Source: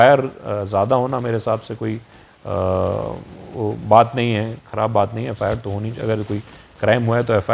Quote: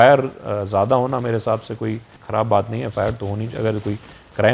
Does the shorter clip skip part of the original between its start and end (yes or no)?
yes